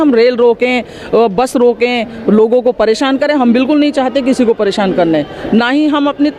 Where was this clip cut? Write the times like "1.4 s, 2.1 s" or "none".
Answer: none

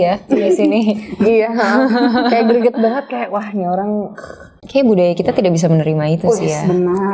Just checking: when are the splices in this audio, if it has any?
4.6 s

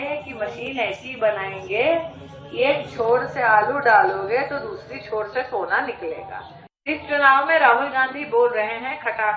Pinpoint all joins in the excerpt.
6.9 s

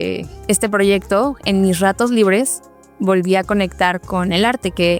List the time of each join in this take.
none

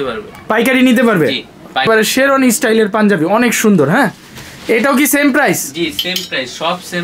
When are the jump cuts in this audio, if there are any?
1.9 s

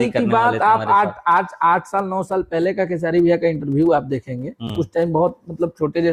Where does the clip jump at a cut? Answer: none

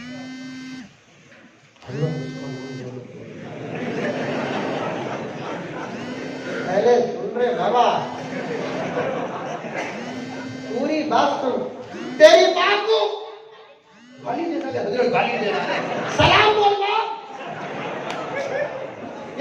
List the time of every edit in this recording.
none

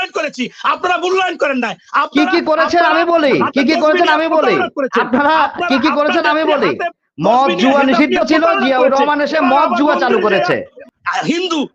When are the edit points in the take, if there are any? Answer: 10.8 s

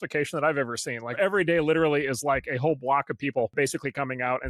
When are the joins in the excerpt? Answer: 1.2 s, 3.5 s

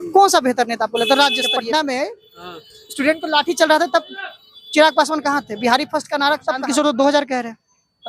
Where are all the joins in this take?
1.6 s, 6.6 s

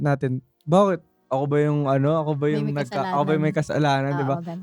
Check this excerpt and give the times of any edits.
none

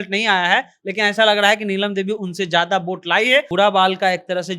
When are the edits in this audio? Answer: 3.5 s

